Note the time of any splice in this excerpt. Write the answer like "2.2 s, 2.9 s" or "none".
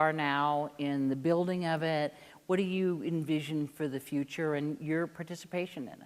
none